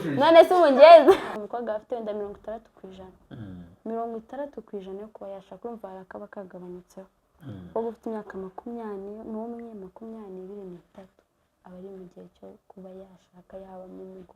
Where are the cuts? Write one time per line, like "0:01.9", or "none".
0:01.4

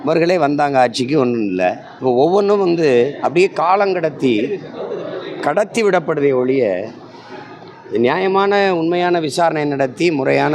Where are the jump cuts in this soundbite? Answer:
0:01.9

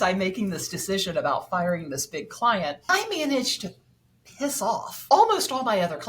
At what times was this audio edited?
0:02.8
0:04.9

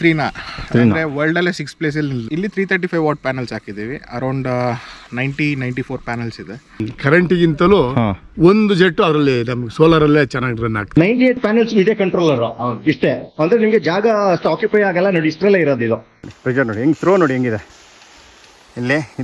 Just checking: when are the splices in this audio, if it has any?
0:02.2
0:07.0
0:10.8
0:16.1

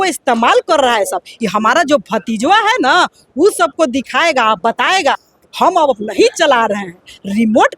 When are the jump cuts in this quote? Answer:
0:05.3

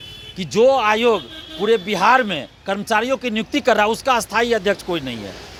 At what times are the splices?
none

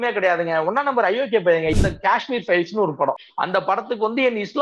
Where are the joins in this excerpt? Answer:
0:01.7
0:03.3

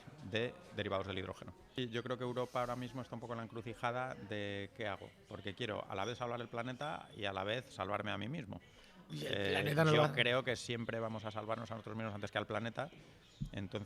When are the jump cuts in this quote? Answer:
0:01.7

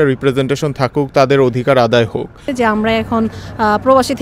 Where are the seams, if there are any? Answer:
0:02.5

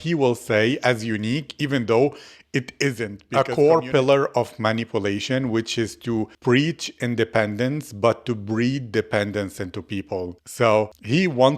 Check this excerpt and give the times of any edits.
0:03.2

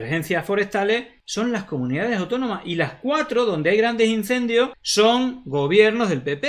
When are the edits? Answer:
0:01.2
0:04.8

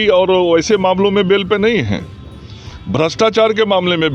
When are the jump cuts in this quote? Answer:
none

